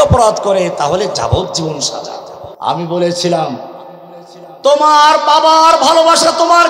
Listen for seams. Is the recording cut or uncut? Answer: cut